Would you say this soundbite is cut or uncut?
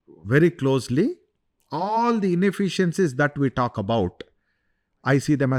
uncut